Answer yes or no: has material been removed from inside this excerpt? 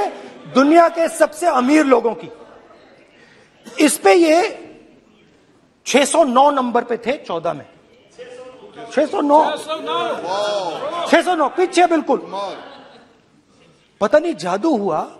no